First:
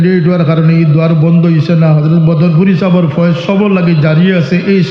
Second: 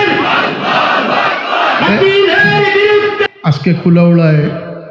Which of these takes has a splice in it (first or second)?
second